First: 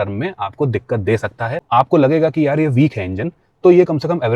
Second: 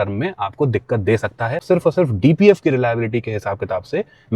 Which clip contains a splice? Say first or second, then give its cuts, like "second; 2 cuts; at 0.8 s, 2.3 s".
first; 1 cut; at 1.6 s